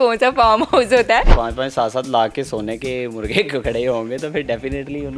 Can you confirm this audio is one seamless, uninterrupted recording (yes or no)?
no